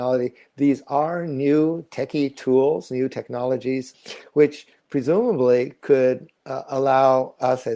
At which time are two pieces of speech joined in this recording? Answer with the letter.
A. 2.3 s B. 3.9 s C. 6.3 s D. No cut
B